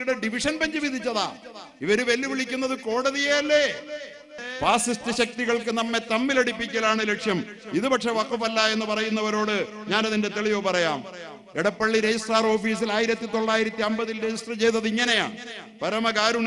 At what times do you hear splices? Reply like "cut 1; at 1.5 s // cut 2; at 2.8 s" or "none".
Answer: cut 1; at 4.4 s